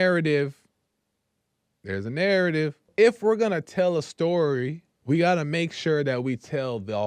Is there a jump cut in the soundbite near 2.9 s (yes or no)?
yes